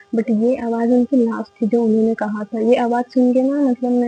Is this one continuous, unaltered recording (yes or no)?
yes